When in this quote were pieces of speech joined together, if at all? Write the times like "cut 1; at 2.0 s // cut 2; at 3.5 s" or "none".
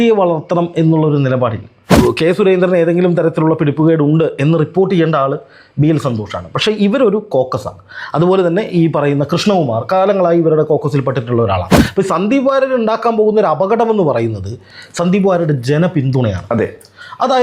cut 1; at 1.9 s // cut 2; at 11.8 s